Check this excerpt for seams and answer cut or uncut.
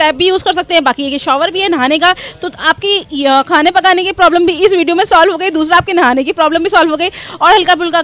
uncut